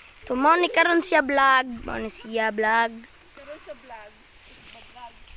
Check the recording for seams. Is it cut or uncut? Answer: uncut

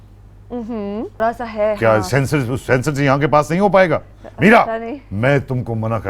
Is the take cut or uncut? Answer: cut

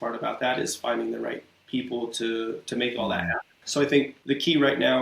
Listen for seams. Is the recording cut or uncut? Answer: cut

